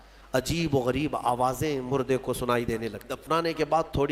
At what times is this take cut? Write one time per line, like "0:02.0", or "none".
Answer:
0:03.1